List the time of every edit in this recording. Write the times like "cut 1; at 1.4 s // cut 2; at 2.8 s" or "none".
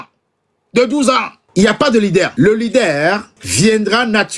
cut 1; at 1.4 s // cut 2; at 2.3 s // cut 3; at 3.4 s

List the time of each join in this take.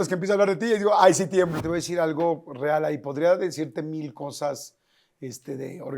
cut 1; at 1.6 s

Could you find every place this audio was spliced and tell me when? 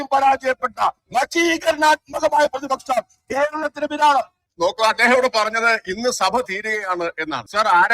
cut 1; at 4.4 s

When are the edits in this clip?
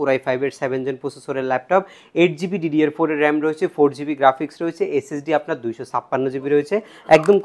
none

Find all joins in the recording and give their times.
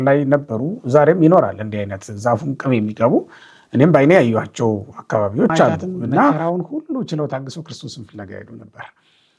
cut 1; at 6.4 s

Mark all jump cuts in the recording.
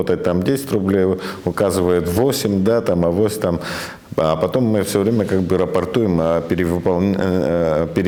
none

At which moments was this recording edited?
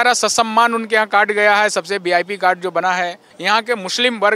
cut 1; at 3.3 s

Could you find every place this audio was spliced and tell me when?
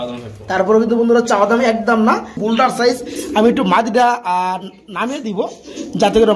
cut 1; at 2.3 s

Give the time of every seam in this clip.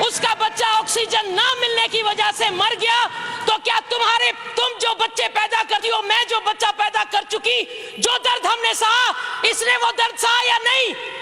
none

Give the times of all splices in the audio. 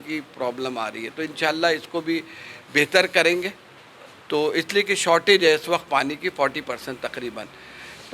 none

